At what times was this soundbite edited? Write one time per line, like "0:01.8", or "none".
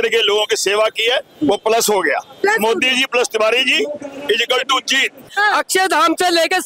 0:05.3

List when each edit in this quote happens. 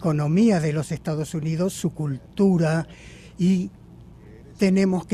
none

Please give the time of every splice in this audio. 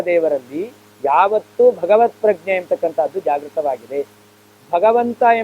none

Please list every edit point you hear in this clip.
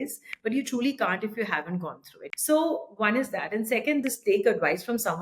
0:02.1
0:04.0

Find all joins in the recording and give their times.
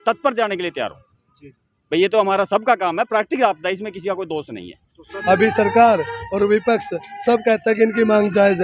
0:05.1

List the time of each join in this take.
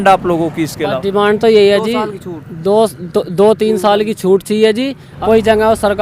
0:05.0

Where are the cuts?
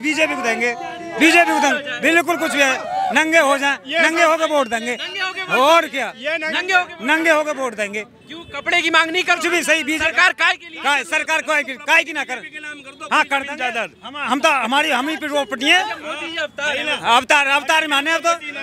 none

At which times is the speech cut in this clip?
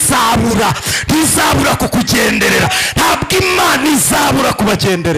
none

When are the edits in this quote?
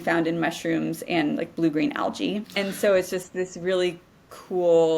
0:02.5

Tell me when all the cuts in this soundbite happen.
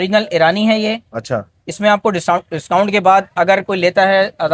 none

